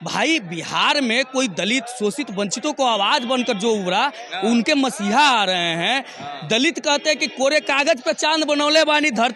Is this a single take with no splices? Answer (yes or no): yes